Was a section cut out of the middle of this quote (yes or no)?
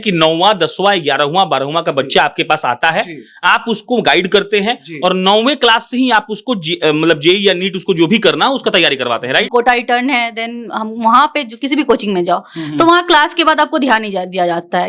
yes